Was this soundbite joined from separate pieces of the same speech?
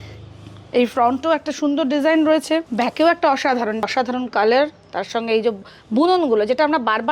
yes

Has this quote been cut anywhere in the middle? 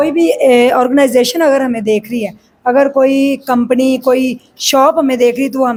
no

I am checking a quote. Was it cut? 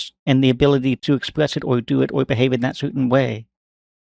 yes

